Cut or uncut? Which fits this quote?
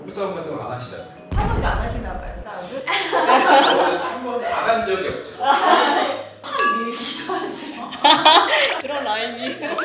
cut